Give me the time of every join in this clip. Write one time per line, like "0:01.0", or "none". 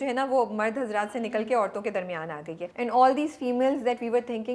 0:02.6